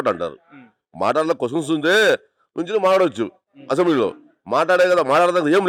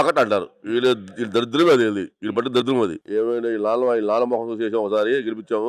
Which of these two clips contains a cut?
second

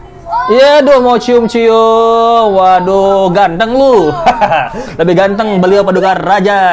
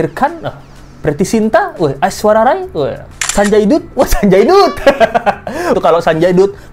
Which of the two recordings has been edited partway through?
second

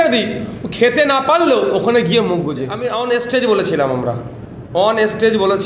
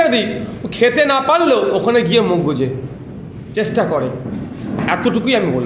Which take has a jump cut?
first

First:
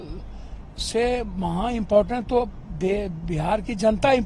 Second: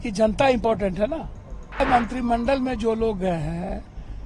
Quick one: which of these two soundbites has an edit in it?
second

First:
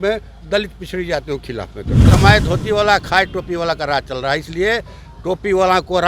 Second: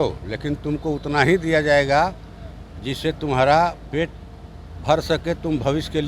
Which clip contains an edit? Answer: first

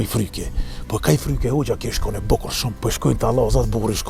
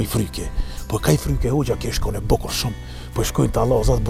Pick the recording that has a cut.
first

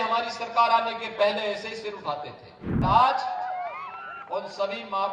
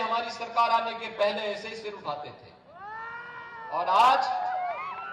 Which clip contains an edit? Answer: first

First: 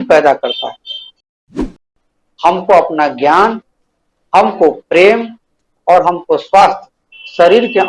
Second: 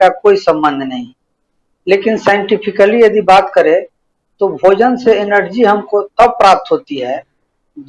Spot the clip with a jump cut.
first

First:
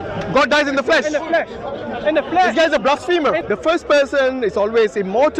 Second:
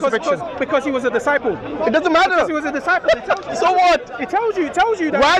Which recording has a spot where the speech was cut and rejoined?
first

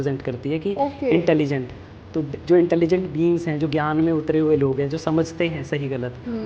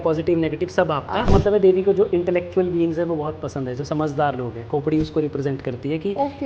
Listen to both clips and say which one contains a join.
second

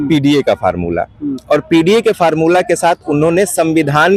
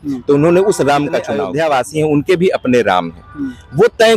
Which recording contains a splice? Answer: second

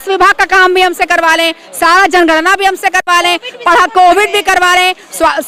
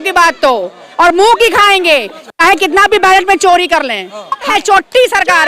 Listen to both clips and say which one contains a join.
second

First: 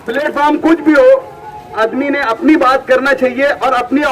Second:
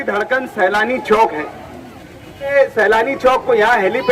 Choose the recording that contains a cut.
second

